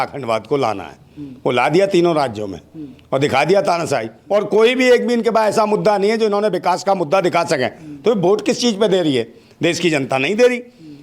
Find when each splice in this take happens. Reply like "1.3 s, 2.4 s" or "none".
4.1 s